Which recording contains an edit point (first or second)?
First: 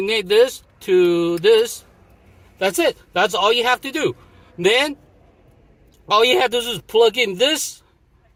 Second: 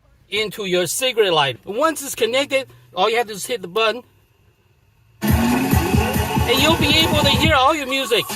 second